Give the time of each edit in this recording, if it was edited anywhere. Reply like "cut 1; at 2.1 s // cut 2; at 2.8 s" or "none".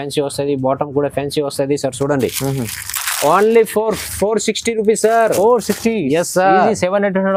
none